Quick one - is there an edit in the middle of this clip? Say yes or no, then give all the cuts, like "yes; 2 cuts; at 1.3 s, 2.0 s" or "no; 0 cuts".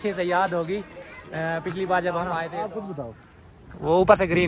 yes; 1 cut; at 2.5 s